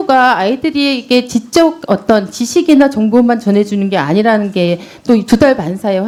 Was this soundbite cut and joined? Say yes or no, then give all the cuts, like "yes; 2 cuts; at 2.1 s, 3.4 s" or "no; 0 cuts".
no; 0 cuts